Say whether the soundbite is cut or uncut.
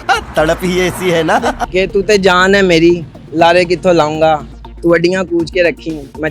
cut